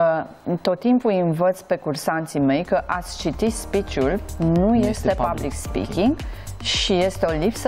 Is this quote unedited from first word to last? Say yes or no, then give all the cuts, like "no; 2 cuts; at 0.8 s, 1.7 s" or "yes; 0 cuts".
yes; 0 cuts